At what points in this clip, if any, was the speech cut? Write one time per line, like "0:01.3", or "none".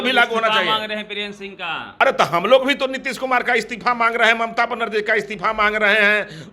0:01.9